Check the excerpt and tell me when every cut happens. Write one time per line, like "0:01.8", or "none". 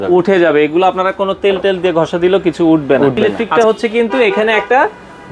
0:03.4